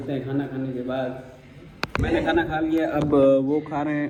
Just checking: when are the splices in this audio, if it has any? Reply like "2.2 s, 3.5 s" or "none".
none

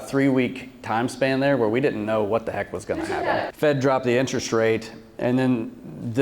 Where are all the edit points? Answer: 3.5 s

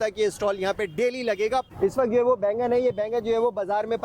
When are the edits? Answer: 1.7 s

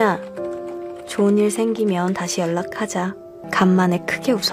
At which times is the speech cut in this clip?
none

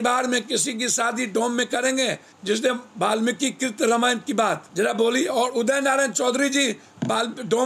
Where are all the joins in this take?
2.3 s, 4.7 s

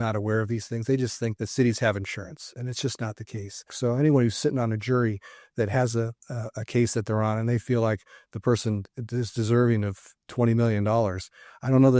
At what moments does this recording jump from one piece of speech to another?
1.3 s, 3.7 s

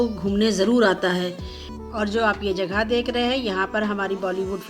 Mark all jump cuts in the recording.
1.8 s

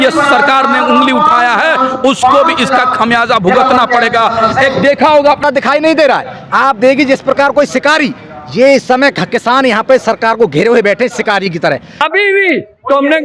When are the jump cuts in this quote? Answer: 5.4 s, 12.1 s

